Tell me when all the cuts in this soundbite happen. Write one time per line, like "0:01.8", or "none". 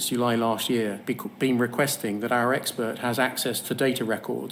none